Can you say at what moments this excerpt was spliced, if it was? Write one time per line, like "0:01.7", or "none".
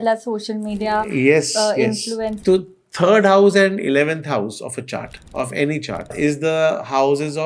0:05.2
0:06.1